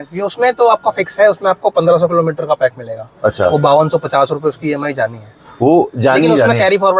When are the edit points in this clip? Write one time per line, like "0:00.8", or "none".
none